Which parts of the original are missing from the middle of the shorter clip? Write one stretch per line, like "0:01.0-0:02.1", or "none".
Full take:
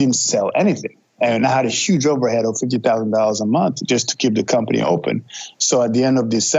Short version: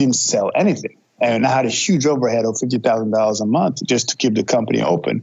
none